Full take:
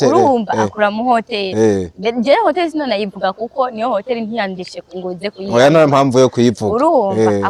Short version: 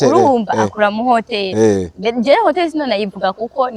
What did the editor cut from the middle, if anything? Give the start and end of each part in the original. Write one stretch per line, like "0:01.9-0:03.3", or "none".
none